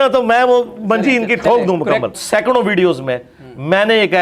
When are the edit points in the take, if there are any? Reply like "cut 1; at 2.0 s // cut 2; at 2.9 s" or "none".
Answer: cut 1; at 2.2 s